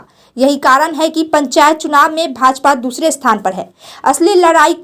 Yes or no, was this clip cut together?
no